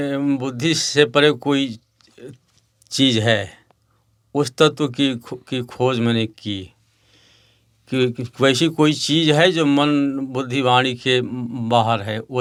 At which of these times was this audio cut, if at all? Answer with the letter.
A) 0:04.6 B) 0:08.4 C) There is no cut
C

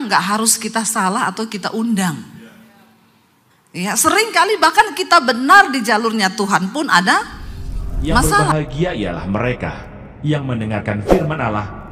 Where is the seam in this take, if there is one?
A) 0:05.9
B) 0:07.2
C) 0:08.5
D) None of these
C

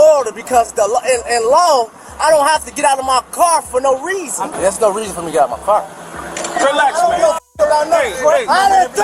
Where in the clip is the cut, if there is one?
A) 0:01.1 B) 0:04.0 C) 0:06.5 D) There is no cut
C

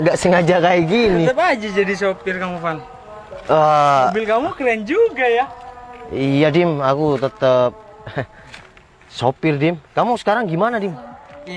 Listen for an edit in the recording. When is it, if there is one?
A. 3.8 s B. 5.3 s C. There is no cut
C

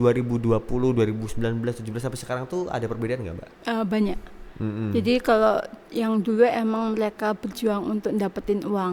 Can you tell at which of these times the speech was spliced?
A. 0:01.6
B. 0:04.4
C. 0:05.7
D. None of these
D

